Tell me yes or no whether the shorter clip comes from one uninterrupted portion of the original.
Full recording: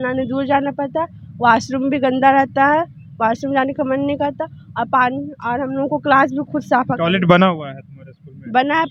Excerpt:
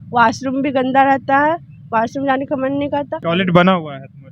no